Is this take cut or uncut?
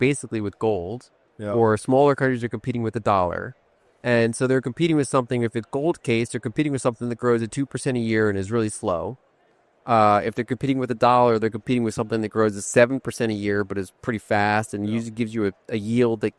uncut